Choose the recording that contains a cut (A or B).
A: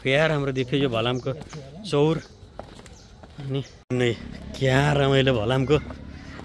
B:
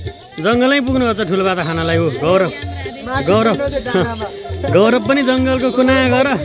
A